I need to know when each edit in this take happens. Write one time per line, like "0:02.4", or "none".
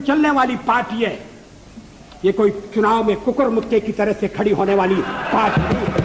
none